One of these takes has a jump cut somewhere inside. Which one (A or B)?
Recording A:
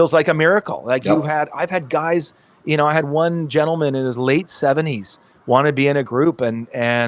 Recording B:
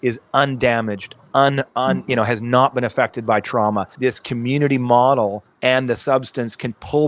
B